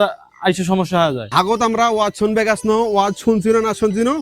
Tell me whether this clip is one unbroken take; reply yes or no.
no